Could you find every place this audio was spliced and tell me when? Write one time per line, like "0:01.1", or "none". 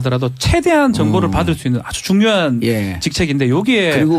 0:01.6